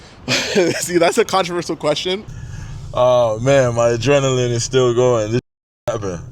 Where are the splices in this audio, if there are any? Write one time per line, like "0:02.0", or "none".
0:02.4